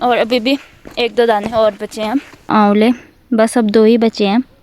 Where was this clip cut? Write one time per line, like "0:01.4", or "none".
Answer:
0:02.5